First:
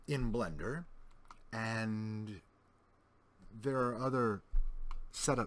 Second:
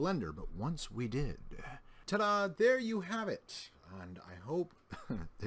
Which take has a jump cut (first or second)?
second